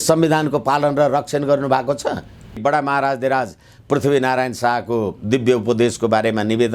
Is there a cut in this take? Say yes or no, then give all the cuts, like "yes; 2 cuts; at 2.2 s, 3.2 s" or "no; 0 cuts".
yes; 1 cut; at 2.6 s